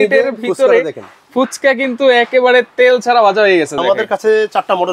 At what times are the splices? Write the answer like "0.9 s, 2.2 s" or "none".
3.8 s

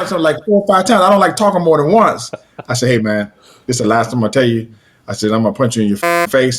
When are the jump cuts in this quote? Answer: none

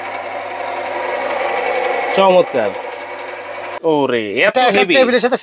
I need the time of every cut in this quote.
3.7 s

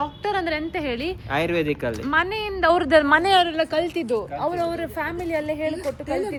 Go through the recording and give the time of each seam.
none

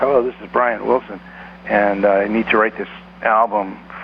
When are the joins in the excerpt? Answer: none

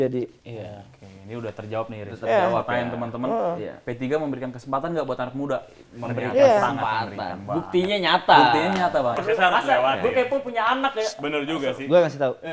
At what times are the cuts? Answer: 9.2 s

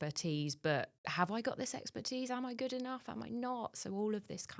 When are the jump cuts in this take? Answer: 1.0 s

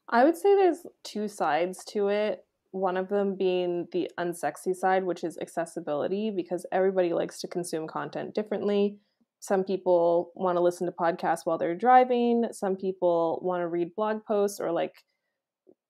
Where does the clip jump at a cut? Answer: 0.9 s

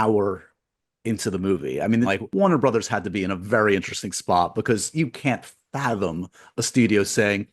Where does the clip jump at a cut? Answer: 2.2 s

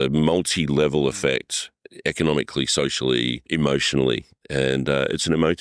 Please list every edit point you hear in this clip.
3.5 s

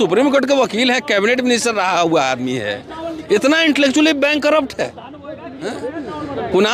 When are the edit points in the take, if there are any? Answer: none

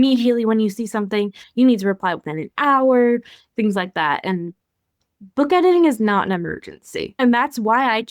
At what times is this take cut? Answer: 7.2 s

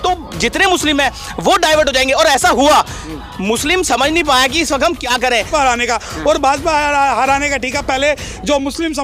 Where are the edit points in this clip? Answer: 5.5 s

